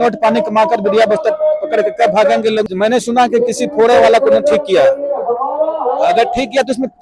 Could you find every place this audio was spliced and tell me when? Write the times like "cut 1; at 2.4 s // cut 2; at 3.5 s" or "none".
cut 1; at 2.7 s